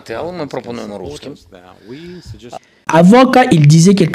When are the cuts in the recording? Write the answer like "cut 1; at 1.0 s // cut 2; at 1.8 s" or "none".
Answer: cut 1; at 2.7 s